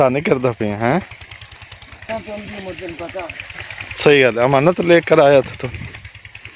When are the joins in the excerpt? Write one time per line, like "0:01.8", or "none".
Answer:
none